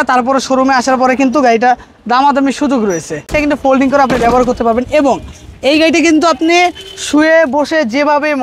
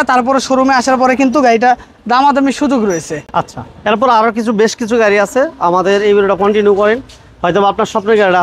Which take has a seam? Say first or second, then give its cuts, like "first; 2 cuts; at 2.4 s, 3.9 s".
first; 1 cut; at 3.2 s